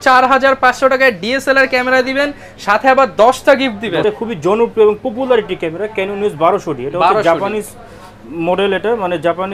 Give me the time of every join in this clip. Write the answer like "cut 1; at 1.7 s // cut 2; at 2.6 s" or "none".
cut 1; at 4.0 s